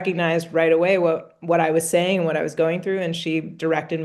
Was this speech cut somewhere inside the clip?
no; 0 cuts

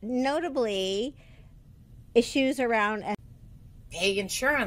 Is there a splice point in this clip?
no; 0 cuts

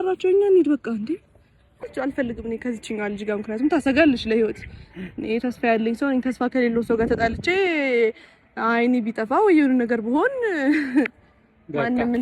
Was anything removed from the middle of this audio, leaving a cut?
yes; 1 cut; at 1.8 s

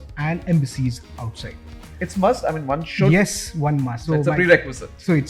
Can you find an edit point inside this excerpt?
yes; 2 cuts; at 1.8 s, 4.0 s

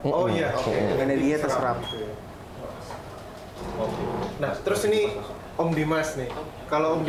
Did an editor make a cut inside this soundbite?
no; 0 cuts

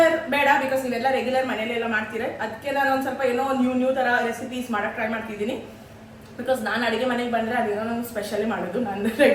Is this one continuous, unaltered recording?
yes; 0 cuts

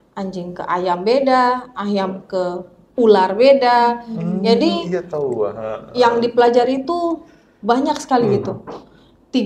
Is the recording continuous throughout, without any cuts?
yes; 0 cuts

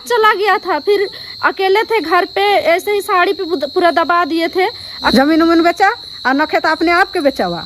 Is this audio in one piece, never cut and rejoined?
no; 1 cut; at 5.0 s

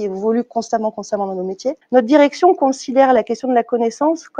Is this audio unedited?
no; 1 cut; at 1.8 s

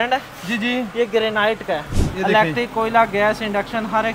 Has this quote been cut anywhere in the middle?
no; 0 cuts

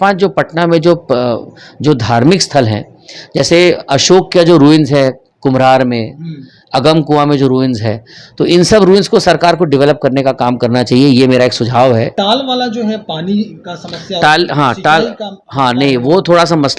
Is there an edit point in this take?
yes; 1 cut; at 12.1 s

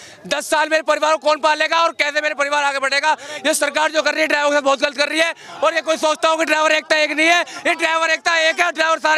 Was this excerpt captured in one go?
yes; 0 cuts

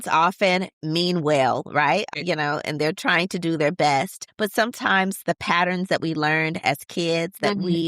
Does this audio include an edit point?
yes; 2 cuts; at 2.1 s, 4.2 s

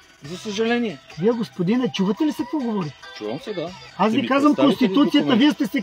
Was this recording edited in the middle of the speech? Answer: yes; 2 cuts; at 1.0 s, 3.8 s

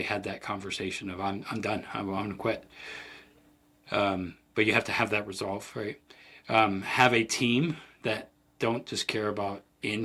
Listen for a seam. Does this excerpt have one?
no; 0 cuts

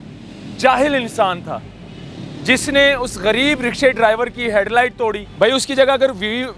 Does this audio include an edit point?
yes; 1 cut; at 5.2 s

